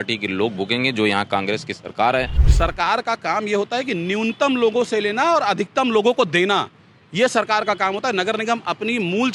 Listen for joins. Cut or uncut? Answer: cut